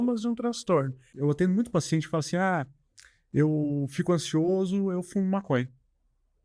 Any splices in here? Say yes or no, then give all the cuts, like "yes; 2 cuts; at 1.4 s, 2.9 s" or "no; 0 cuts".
yes; 1 cut; at 1.1 s